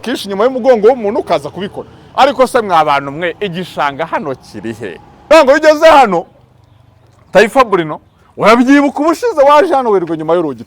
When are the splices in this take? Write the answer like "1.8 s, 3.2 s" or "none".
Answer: 5.1 s